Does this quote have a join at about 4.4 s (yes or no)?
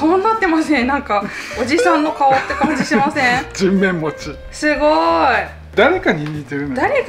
no